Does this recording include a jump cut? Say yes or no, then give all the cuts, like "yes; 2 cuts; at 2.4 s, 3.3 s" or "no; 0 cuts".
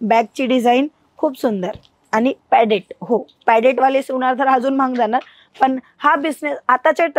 no; 0 cuts